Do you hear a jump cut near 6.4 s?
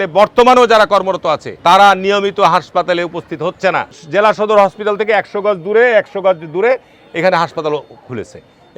no; 2 cuts; at 1.5 s, 4.0 s

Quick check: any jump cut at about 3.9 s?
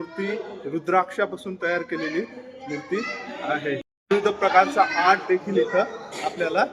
yes; 1 cut; at 3.9 s

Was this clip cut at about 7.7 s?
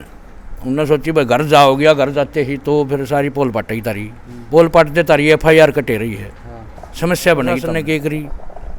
yes; 1 cut; at 7.7 s

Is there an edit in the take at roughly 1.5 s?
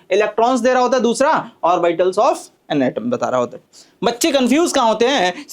no; 1 cut; at 3.6 s

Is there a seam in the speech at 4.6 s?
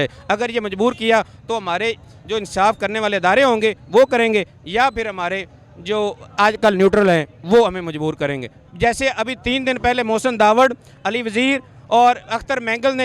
no; 1 cut; at 8.6 s

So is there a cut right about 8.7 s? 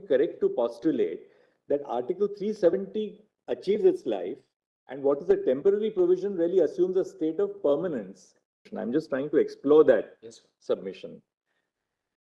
yes; 1 cut; at 8.7 s

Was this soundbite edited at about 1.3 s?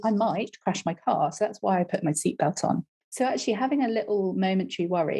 no; 1 cut; at 3.0 s

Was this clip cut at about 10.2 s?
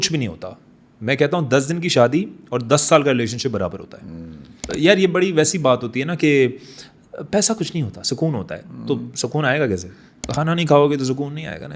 yes; 2 cuts; at 4.6 s, 10.2 s

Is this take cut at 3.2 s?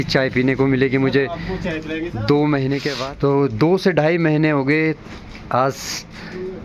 no; 0 cuts

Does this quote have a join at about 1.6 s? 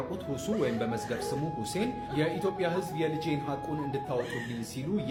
no; 0 cuts

